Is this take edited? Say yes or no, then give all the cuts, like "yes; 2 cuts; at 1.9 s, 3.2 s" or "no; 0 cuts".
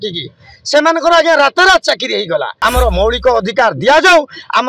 yes; 1 cut; at 2.5 s